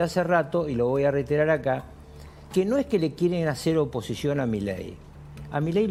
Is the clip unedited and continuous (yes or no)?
yes